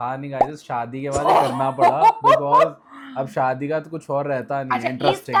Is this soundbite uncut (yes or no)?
yes